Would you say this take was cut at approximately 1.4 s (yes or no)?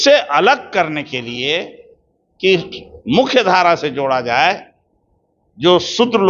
no